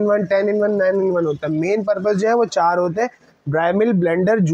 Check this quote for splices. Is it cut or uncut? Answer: uncut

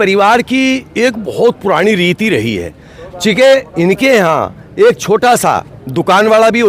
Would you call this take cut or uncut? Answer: uncut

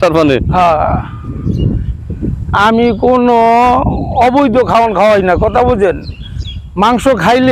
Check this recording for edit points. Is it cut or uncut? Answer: uncut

